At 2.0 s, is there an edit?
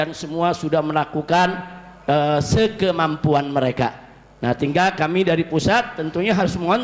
no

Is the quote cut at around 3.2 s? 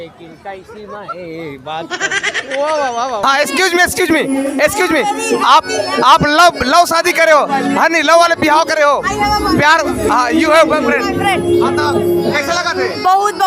yes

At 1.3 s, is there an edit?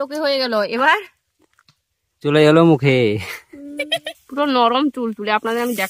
no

